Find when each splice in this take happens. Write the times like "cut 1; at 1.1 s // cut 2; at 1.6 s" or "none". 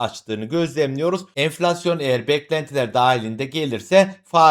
cut 1; at 1.3 s